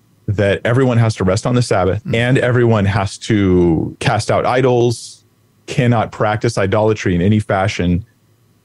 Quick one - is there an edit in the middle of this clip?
yes; 2 cuts; at 2.0 s, 3.9 s

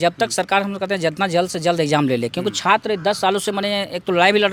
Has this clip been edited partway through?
no; 0 cuts

